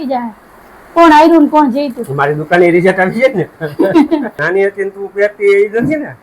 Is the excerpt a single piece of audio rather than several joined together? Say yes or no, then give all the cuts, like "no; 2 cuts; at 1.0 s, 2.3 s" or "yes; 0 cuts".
no; 1 cut; at 4.4 s